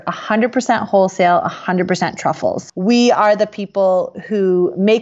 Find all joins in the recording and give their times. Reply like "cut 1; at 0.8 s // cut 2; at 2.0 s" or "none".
cut 1; at 2.7 s